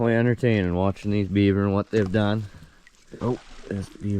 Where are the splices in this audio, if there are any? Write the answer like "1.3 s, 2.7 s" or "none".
3.0 s